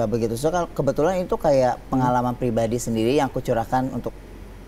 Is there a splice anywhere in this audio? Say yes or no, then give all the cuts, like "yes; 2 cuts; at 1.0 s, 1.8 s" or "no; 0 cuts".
no; 0 cuts